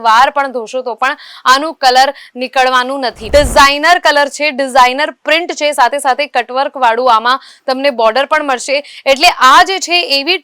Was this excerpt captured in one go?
no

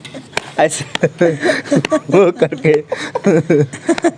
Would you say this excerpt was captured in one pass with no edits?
yes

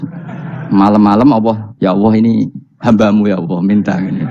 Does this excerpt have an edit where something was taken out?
yes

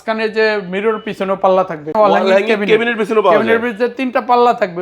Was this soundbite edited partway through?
yes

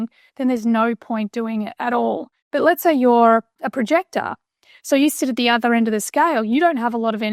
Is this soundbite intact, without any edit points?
no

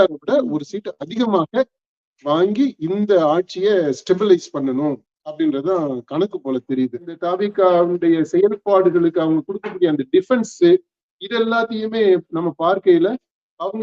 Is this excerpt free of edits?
no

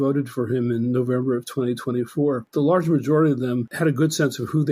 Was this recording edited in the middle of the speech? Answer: yes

